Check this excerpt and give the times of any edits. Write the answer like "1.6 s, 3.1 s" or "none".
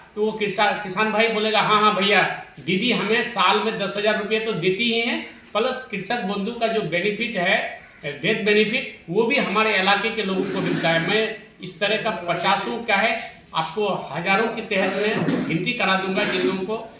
none